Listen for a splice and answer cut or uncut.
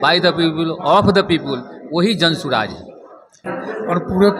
cut